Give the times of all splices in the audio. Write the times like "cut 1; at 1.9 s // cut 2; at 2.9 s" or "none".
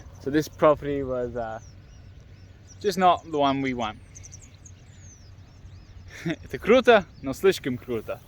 none